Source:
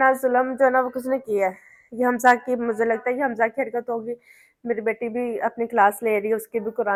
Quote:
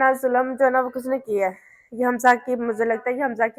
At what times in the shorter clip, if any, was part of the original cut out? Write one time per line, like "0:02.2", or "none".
none